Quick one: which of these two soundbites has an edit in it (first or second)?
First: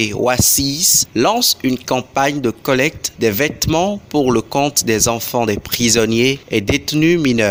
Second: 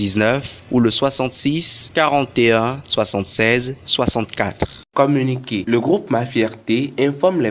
second